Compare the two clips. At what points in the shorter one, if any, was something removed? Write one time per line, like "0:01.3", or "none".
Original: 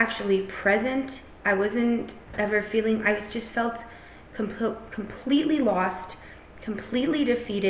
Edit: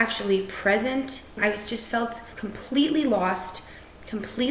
0:01.4
0:02.3